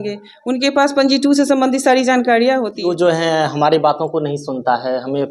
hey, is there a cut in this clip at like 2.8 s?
yes; 1 cut; at 2.8 s

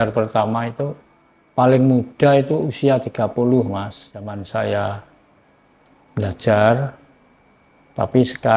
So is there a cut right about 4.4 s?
yes; 1 cut; at 4.4 s

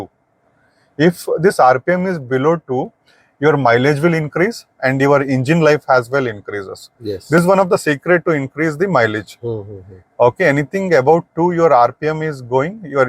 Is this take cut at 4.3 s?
no; 0 cuts

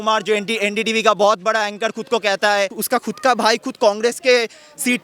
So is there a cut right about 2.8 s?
yes; 1 cut; at 2.8 s

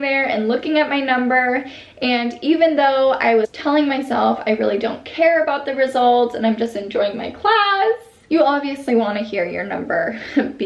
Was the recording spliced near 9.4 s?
no; 2 cuts; at 3.5 s, 8.1 s

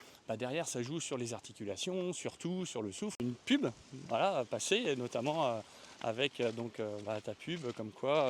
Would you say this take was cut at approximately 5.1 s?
no; 1 cut; at 3.2 s

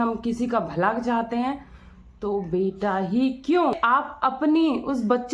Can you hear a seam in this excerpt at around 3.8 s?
yes; 1 cut; at 3.8 s

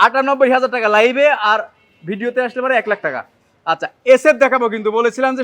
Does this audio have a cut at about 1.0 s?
no; 0 cuts

